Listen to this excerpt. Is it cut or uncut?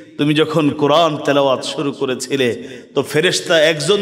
uncut